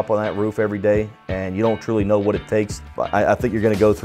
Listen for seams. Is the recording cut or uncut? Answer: cut